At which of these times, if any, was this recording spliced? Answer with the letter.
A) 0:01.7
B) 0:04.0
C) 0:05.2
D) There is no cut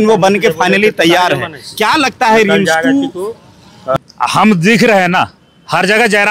B